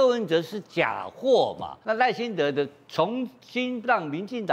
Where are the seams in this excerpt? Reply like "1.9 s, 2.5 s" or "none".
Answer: 1.7 s